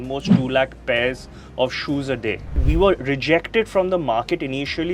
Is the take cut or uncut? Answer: cut